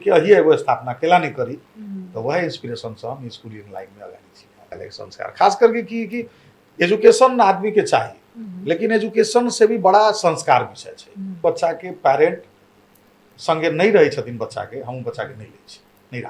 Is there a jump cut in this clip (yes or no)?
yes